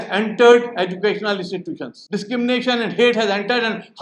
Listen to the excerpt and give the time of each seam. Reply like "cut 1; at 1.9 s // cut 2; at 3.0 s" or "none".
cut 1; at 1.9 s